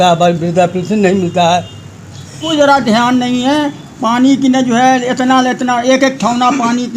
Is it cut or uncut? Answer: cut